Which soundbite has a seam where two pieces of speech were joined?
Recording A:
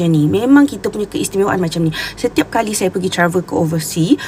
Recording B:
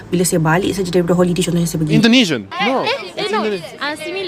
B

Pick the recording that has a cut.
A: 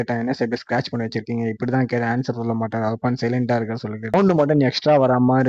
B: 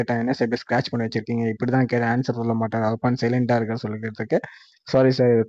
A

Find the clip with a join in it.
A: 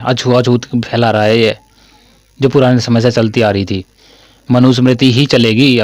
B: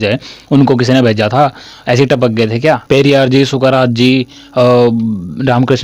B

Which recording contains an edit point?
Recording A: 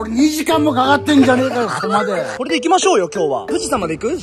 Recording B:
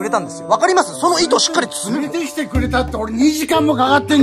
A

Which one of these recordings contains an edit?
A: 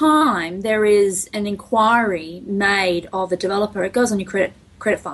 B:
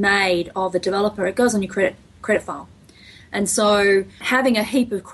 B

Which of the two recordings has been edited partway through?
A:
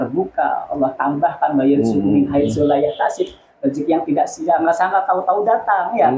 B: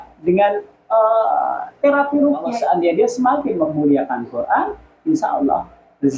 B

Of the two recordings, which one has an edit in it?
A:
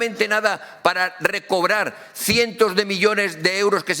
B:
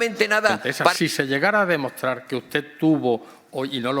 B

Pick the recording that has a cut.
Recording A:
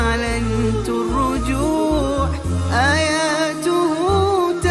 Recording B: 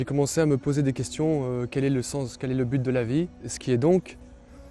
B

